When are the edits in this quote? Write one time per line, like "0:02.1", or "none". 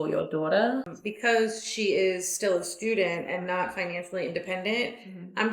0:00.9